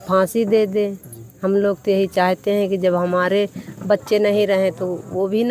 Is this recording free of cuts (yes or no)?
yes